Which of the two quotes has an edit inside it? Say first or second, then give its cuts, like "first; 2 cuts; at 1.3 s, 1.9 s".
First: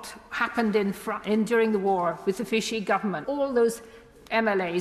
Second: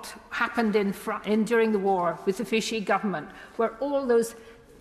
first; 1 cut; at 3.2 s